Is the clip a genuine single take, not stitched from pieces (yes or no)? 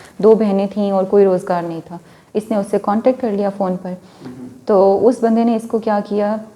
yes